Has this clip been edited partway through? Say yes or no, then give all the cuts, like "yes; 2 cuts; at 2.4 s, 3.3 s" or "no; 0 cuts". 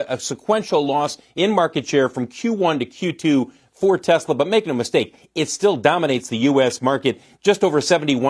no; 0 cuts